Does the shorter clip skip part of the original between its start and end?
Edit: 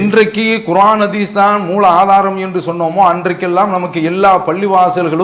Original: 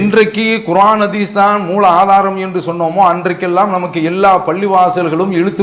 no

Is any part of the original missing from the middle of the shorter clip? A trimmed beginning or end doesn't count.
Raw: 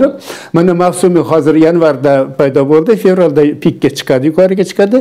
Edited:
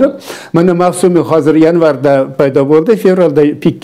no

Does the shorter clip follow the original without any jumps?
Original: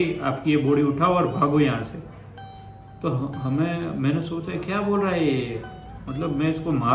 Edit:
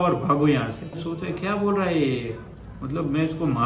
no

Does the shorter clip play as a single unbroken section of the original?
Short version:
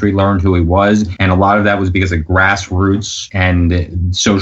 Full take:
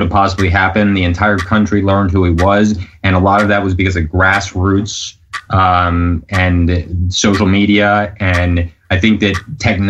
no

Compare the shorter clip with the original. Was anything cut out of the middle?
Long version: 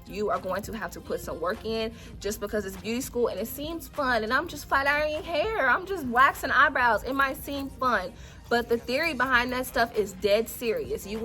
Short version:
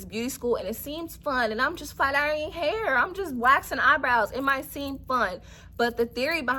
no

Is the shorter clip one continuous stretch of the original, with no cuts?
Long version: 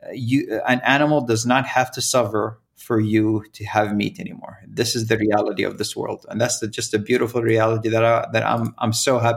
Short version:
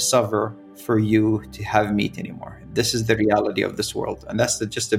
yes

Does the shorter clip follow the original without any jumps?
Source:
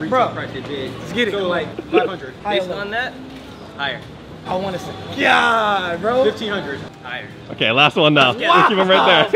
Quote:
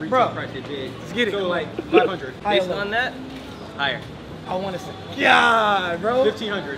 yes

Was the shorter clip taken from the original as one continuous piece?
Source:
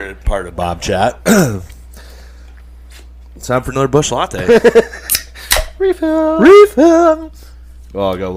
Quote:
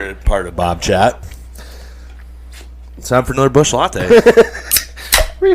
no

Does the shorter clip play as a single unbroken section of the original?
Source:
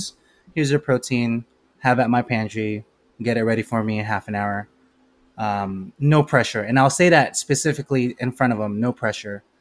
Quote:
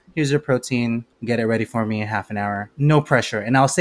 no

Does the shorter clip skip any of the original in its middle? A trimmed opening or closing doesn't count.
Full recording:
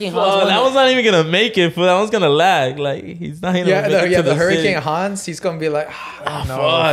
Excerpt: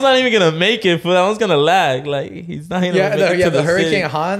no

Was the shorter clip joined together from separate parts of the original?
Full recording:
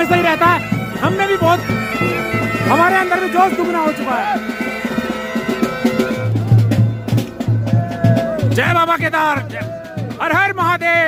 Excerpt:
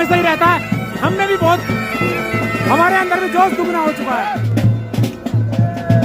yes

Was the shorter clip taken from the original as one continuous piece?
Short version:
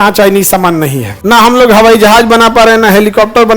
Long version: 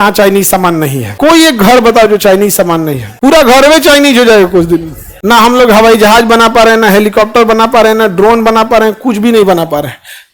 no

